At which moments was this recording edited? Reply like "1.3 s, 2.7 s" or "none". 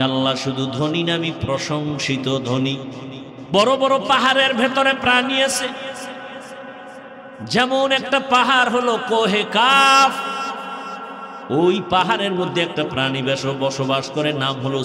3.3 s